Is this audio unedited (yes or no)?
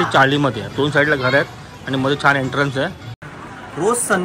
no